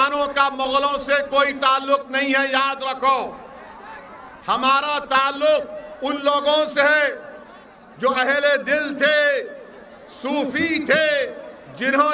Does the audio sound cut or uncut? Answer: uncut